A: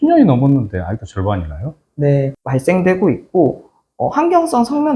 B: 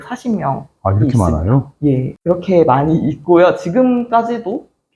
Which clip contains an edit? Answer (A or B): A